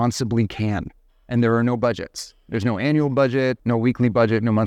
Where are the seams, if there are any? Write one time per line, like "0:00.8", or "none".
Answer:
0:03.6